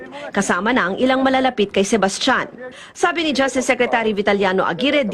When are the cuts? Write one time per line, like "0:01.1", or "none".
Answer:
0:02.4